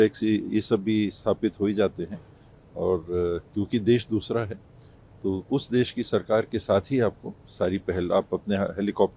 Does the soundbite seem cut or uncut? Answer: uncut